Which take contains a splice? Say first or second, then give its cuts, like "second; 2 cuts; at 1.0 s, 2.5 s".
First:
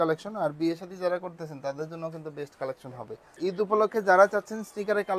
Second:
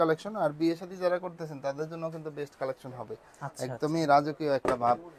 first; 1 cut; at 3.3 s